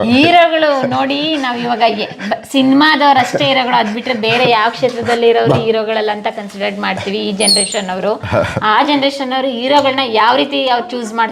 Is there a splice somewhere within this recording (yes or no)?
no